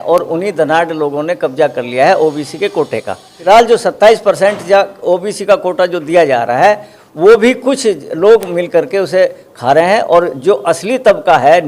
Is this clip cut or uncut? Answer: cut